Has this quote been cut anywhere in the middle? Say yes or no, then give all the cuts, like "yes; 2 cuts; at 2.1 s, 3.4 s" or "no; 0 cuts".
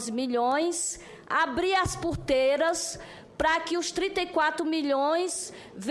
no; 0 cuts